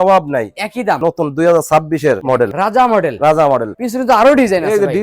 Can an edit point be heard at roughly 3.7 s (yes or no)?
yes